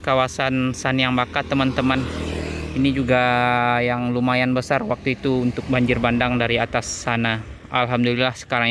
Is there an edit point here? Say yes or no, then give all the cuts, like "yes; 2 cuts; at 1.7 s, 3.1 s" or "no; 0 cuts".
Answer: no; 0 cuts